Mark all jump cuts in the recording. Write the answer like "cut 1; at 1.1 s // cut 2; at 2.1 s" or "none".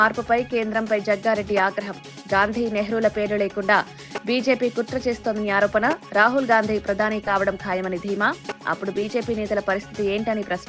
none